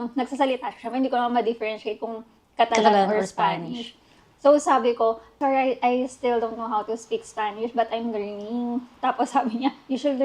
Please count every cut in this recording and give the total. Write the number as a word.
one